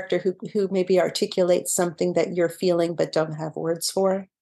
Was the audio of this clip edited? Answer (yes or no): no